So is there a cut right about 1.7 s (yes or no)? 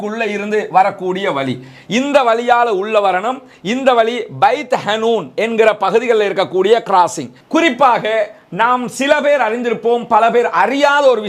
no